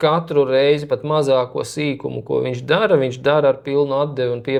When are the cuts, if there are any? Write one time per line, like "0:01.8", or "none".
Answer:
none